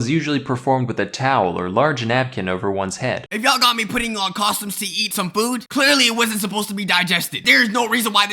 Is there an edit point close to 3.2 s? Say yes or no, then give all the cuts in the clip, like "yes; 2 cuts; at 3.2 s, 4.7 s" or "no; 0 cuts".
yes; 2 cuts; at 3.2 s, 4.9 s